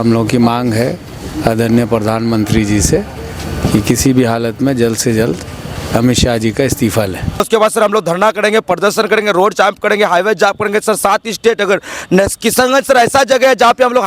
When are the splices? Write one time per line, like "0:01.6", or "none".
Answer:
0:07.4